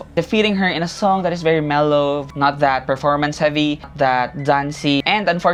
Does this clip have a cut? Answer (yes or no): no